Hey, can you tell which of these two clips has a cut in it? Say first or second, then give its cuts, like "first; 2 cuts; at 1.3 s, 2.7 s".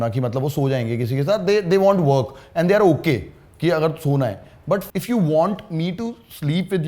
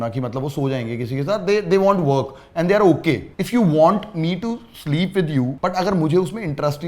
second; 2 cuts; at 3.4 s, 5.5 s